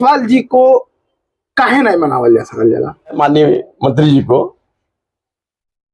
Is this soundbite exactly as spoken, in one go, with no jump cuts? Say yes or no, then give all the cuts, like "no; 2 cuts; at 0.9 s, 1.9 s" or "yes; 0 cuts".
no; 1 cut; at 3.2 s